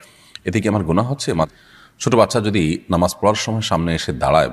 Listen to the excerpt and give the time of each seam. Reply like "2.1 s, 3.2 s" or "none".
1.5 s